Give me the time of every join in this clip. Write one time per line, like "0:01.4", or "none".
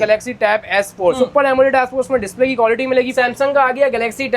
0:03.1